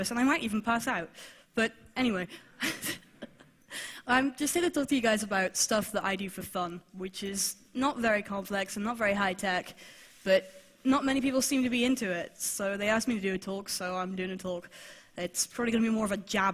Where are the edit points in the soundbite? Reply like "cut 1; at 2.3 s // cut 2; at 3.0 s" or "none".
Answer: cut 1; at 6.6 s